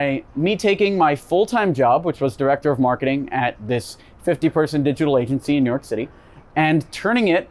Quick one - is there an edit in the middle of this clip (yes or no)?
no